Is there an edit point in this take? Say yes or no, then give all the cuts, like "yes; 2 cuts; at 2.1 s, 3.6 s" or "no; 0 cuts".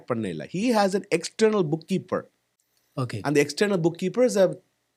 no; 0 cuts